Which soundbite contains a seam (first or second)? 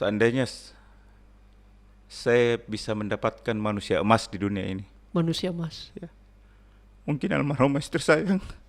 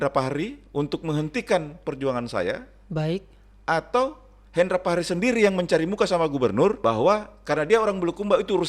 second